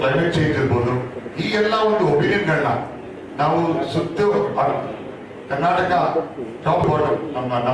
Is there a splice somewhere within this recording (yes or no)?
yes